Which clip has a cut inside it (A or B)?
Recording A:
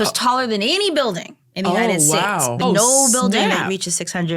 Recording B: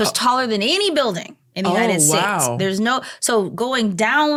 A